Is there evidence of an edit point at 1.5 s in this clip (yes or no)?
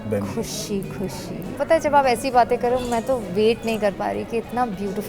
yes